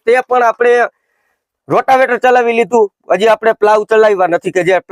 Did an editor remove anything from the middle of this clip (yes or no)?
no